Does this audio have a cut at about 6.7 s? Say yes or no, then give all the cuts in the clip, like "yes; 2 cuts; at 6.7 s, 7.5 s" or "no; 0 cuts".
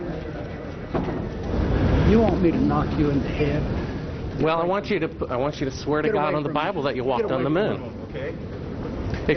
no; 1 cut; at 1.4 s